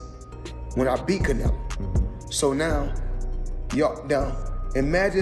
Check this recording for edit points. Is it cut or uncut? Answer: uncut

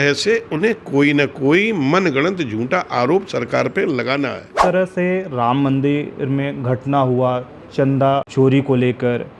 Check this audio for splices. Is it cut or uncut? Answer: cut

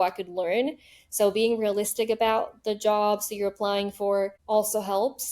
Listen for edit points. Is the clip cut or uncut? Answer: cut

